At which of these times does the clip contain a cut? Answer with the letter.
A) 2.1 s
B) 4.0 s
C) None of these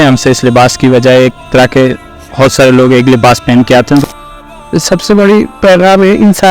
B